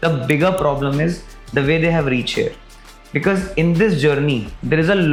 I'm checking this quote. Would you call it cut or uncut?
uncut